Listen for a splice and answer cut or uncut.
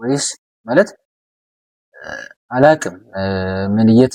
uncut